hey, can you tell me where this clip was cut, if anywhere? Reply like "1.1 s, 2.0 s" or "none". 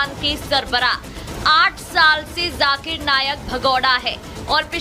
none